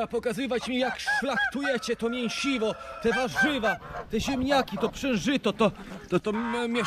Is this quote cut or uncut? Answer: uncut